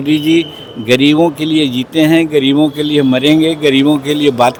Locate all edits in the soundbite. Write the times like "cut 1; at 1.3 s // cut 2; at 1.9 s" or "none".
none